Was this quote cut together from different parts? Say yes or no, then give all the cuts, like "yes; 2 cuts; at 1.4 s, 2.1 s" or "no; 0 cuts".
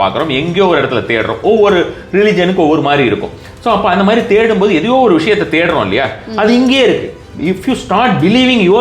yes; 1 cut; at 7.3 s